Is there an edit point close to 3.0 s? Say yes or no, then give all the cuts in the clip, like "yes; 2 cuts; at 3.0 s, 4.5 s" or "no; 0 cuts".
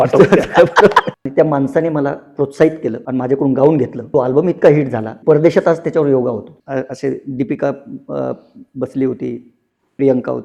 yes; 5 cuts; at 1.1 s, 3.0 s, 4.0 s, 5.1 s, 6.5 s